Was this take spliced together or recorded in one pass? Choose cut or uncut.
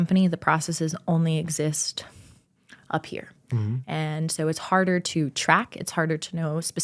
uncut